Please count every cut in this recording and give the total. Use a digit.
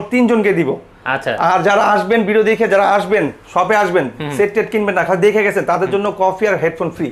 0